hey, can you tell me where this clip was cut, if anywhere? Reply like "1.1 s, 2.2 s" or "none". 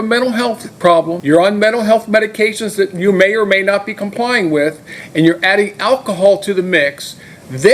1.2 s

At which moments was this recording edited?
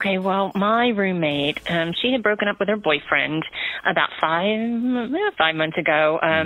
none

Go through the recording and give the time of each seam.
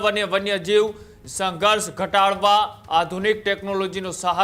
none

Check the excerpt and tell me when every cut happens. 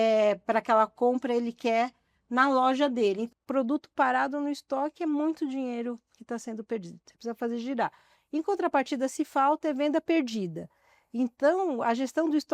3.3 s

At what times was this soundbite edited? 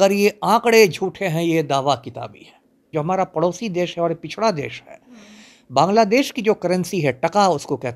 2.8 s

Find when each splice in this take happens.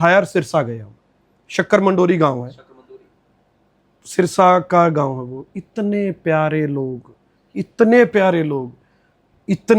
none

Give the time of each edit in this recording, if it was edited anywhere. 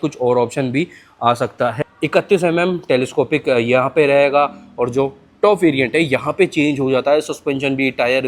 1.8 s

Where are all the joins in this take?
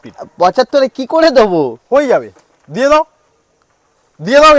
none

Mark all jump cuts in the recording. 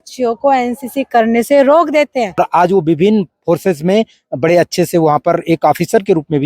2.4 s

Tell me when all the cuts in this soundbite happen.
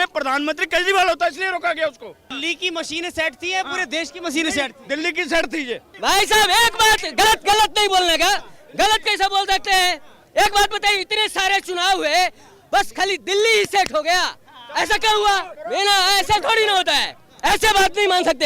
2.3 s, 5.9 s, 15.5 s

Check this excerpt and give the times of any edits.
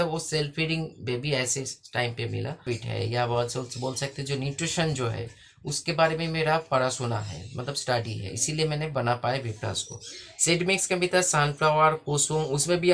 2.7 s

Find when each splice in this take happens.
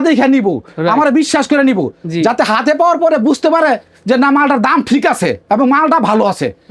none

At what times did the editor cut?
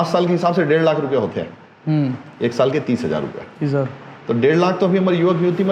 none

